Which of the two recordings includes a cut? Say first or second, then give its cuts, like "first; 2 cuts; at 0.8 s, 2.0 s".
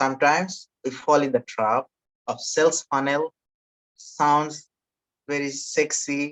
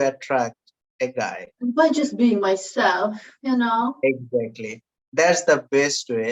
second; 1 cut; at 1.5 s